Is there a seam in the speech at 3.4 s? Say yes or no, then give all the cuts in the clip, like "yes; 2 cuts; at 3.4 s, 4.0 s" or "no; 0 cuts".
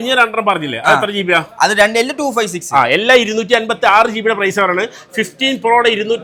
no; 0 cuts